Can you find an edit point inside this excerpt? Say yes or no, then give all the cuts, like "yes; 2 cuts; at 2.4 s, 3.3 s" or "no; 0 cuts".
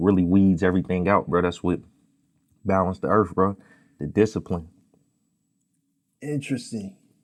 no; 0 cuts